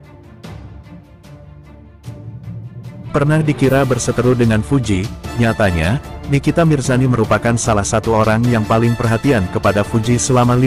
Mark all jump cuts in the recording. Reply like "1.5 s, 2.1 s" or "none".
3.1 s